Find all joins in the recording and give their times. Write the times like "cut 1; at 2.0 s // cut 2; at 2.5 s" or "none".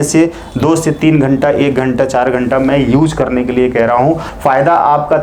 cut 1; at 4.3 s